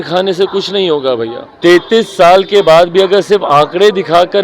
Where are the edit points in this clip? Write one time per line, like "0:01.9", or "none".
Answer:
0:01.4